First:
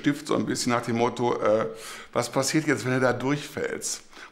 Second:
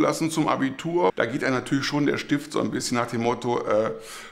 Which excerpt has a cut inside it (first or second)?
second